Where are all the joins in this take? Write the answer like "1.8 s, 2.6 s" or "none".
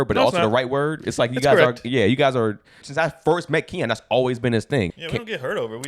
2.8 s, 4.9 s